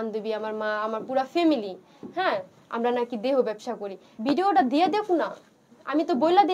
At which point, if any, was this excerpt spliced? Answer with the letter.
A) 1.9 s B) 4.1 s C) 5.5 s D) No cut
B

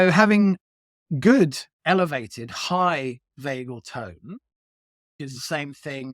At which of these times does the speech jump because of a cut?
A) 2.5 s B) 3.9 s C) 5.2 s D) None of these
C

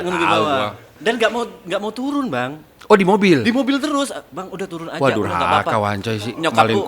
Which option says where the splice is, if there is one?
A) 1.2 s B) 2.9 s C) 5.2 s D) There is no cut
A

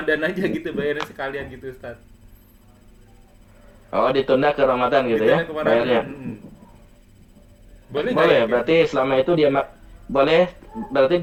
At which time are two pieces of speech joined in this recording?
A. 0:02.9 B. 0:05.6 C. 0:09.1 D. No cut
D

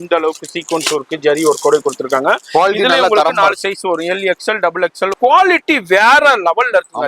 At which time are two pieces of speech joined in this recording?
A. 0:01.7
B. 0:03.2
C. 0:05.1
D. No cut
C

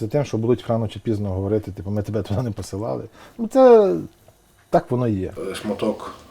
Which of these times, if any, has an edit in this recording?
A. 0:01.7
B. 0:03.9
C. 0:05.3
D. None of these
C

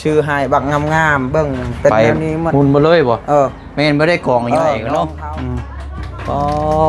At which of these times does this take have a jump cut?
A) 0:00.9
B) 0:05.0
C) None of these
B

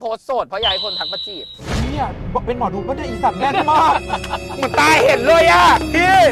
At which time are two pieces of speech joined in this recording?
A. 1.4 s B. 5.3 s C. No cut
C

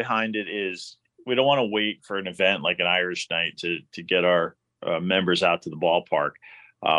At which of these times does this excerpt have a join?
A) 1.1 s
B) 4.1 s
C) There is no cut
A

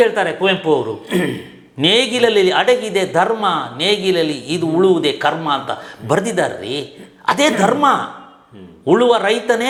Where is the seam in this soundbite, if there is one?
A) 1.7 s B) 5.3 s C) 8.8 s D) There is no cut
D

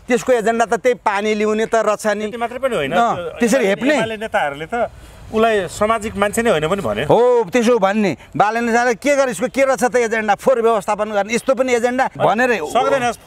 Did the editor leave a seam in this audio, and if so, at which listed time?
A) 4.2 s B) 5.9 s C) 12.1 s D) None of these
C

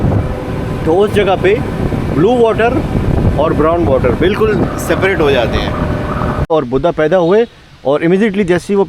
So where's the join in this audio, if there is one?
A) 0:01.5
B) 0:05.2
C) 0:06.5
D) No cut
C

